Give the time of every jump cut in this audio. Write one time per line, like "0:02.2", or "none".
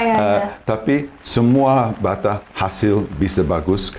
none